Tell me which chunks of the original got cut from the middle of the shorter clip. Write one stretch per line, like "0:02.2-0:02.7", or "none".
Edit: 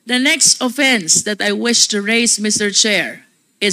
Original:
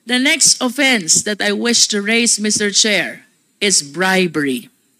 none